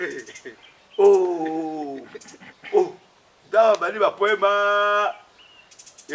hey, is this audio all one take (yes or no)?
yes